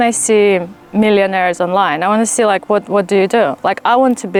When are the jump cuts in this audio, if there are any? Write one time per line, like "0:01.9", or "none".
none